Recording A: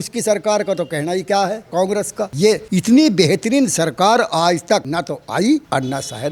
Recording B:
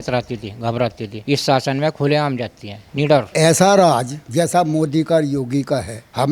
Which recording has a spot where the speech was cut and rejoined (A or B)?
B